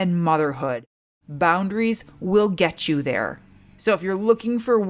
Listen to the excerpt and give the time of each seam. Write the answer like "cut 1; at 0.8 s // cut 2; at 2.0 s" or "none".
none